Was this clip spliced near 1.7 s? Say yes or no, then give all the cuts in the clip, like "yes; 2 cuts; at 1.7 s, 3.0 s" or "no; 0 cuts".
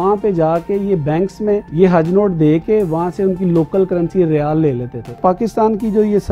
yes; 2 cuts; at 1.7 s, 5.2 s